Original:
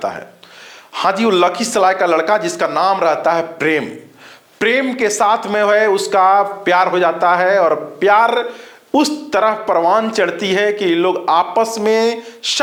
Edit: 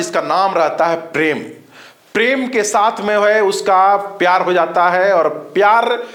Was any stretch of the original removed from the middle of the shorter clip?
no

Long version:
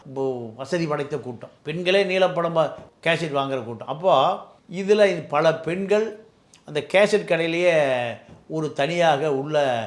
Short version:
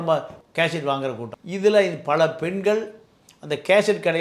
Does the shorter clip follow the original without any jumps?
no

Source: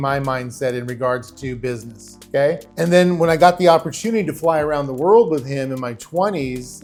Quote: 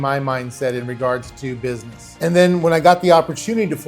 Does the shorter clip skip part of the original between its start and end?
yes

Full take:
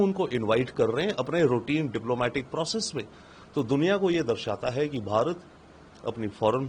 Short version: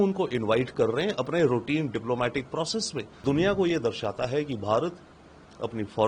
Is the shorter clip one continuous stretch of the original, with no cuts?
no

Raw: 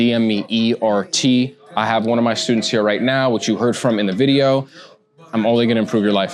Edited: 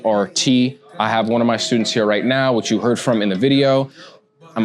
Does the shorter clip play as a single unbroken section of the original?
yes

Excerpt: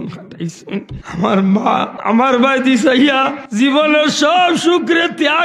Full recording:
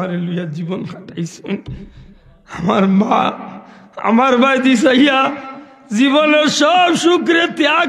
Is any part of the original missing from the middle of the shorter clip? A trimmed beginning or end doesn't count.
yes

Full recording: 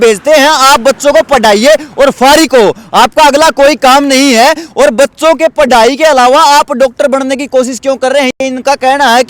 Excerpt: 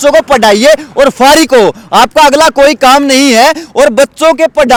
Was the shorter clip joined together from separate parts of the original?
no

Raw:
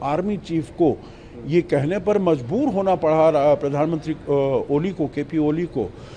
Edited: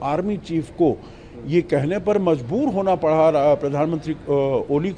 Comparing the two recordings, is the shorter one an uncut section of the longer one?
yes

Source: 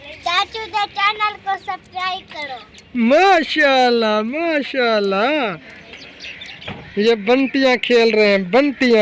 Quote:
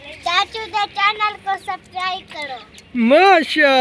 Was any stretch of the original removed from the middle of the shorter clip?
no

